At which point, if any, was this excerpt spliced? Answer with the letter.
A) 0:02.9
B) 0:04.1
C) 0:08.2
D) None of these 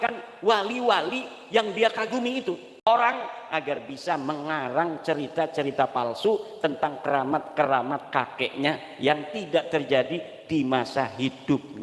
A